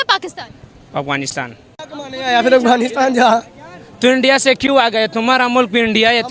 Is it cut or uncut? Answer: cut